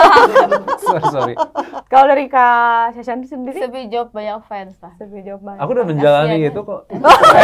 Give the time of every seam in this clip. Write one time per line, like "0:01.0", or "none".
none